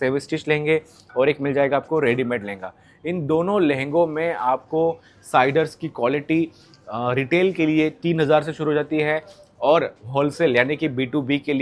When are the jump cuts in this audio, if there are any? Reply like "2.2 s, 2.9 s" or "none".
none

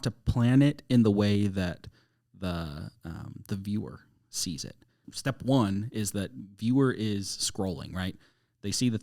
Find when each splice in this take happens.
none

